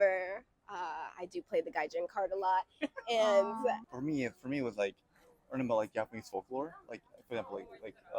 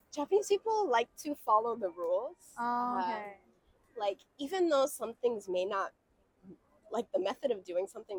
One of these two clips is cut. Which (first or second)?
first